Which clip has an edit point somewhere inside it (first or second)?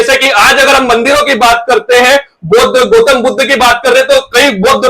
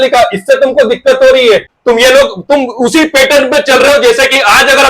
second